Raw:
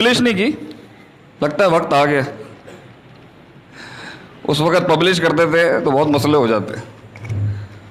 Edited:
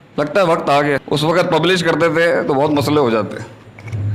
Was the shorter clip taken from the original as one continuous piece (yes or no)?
no